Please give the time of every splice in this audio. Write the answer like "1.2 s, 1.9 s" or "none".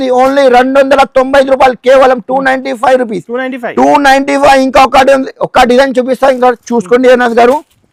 none